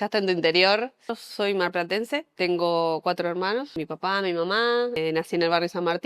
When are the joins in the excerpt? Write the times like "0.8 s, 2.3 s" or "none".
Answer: 1.2 s, 2.3 s, 3.8 s, 5.0 s